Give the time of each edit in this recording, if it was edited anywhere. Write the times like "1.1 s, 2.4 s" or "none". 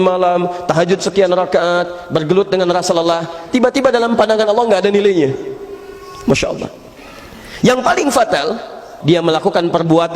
8.9 s